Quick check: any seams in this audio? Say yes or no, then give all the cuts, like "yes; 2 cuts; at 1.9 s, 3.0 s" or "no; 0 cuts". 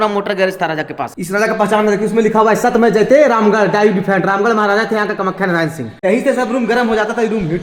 yes; 2 cuts; at 1.2 s, 5.9 s